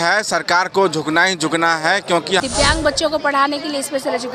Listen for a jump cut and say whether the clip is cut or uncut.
cut